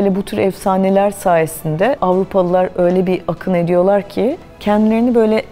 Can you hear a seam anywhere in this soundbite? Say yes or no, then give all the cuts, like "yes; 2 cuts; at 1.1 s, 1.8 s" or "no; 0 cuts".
yes; 1 cut; at 4.5 s